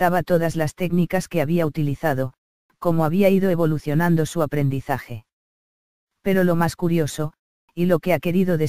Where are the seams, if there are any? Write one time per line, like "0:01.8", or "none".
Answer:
0:05.0